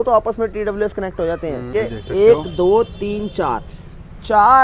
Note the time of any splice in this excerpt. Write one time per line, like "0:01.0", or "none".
0:01.7